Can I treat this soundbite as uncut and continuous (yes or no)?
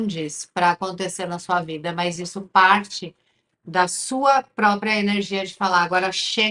yes